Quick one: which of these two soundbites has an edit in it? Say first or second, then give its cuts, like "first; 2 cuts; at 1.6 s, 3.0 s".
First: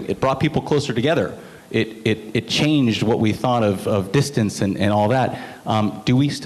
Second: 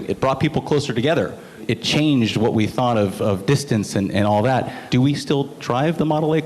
second; 2 cuts; at 1.6 s, 4.8 s